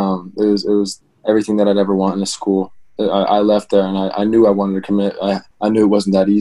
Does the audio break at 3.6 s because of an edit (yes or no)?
no